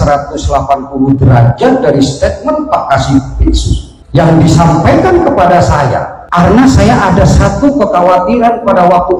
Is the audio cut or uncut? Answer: uncut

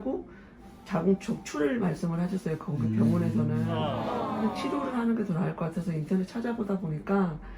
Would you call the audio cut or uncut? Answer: cut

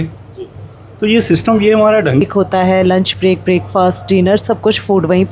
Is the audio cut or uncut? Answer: cut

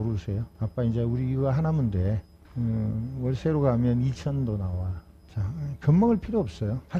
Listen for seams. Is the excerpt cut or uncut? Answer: uncut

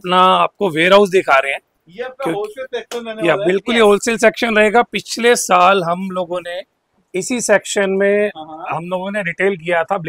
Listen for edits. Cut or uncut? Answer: uncut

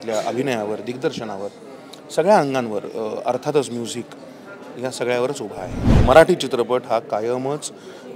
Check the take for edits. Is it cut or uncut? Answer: cut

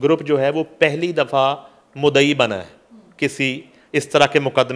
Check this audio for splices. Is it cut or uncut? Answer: uncut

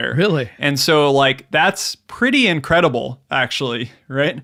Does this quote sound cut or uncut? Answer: uncut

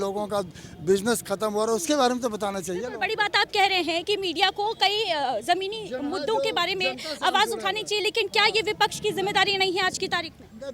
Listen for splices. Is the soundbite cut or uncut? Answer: uncut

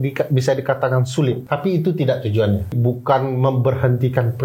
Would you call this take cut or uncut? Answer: cut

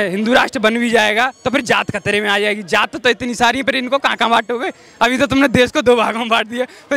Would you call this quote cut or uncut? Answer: uncut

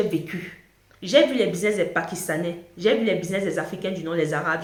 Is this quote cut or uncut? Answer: uncut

